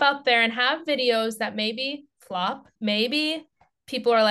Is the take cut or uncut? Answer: cut